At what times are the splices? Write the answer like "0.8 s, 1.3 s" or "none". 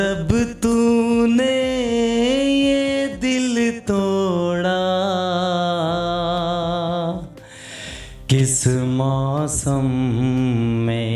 none